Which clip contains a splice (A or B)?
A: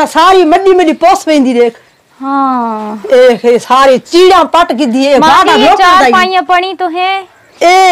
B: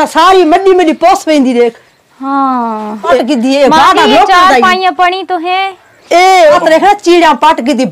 B